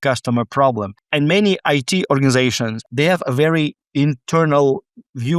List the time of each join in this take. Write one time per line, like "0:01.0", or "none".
0:01.0
0:02.8